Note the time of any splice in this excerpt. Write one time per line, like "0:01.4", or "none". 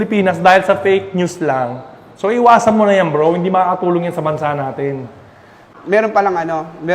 0:05.5